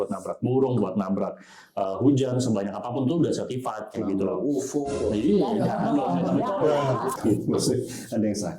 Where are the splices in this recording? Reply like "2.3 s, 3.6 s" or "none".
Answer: 7.2 s

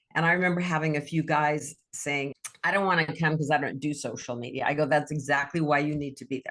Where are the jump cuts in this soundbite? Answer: 2.3 s

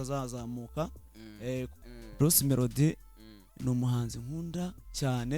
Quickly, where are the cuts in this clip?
1.8 s

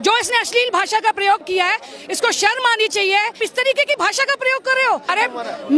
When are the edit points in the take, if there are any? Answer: 3.4 s, 5.0 s

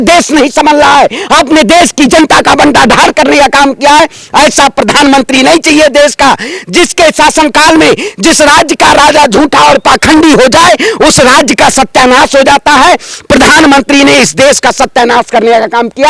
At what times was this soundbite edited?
none

